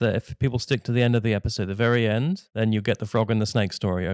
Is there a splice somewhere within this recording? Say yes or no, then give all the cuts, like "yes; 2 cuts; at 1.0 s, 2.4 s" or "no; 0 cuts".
yes; 1 cut; at 2.5 s